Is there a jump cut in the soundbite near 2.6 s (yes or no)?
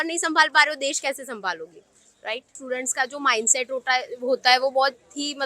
yes